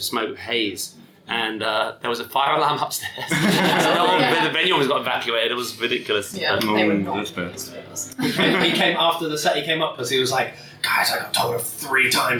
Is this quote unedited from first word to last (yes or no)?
yes